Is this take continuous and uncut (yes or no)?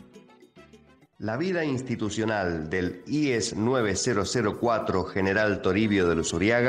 no